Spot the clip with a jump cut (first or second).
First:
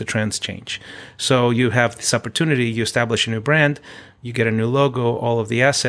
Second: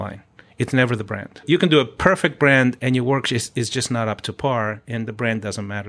second